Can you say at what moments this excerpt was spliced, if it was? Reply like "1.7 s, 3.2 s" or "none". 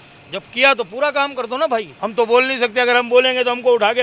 1.9 s

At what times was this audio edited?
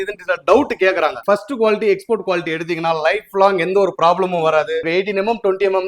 1.2 s, 4.8 s

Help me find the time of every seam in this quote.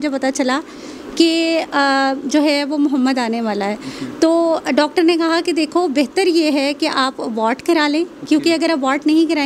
none

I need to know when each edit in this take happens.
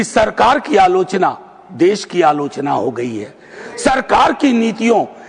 none

